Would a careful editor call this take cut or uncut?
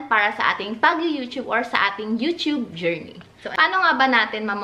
cut